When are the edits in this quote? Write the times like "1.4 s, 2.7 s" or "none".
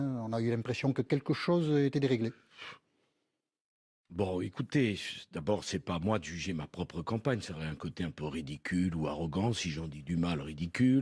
none